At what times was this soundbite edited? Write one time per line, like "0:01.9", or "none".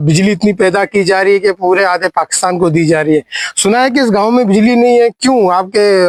none